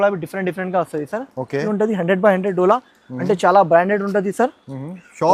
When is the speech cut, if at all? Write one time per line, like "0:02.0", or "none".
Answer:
0:01.7